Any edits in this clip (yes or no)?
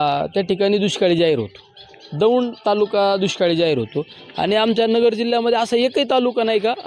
no